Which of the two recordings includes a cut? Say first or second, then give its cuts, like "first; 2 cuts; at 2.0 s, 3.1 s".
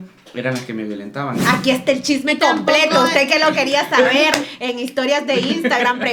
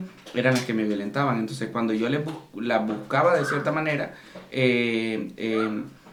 first; 1 cut; at 1.4 s